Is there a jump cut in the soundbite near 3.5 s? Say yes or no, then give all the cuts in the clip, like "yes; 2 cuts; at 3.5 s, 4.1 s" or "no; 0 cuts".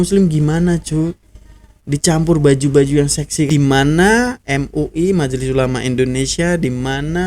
yes; 1 cut; at 3.5 s